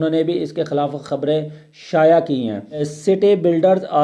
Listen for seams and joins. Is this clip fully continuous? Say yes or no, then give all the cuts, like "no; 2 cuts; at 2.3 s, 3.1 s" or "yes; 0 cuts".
no; 1 cut; at 2.9 s